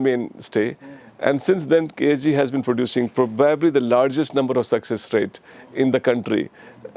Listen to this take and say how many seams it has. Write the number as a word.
zero